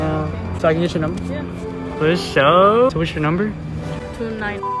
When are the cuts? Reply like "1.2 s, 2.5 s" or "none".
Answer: 2.9 s